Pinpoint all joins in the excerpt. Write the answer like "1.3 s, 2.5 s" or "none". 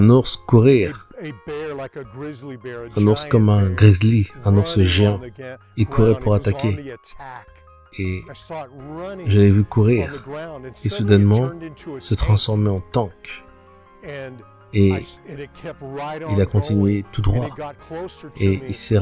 none